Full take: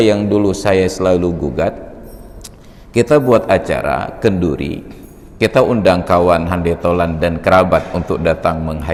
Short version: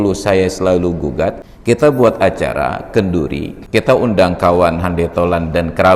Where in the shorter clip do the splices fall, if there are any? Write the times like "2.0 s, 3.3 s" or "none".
1.5 s, 3.5 s